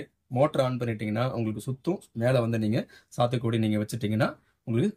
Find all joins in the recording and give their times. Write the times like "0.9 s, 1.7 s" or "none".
none